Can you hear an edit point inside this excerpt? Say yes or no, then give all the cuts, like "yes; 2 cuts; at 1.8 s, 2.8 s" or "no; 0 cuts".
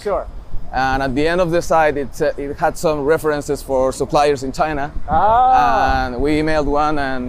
no; 0 cuts